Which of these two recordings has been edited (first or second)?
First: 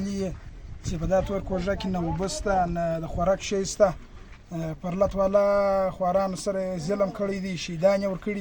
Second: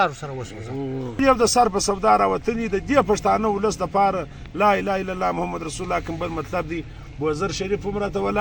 second